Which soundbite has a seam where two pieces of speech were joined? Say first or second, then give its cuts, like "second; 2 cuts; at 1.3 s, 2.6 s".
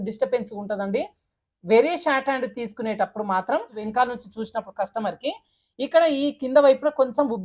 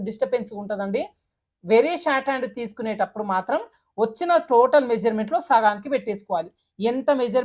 first; 1 cut; at 3.8 s